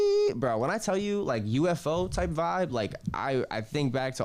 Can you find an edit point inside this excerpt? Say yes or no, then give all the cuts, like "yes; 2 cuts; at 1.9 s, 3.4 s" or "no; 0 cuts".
no; 0 cuts